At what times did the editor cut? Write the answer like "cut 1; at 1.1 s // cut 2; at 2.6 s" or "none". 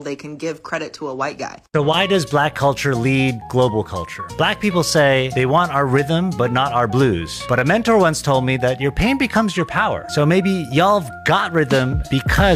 cut 1; at 1.6 s